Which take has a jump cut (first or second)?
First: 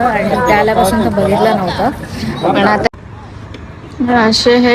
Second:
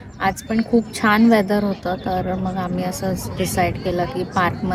first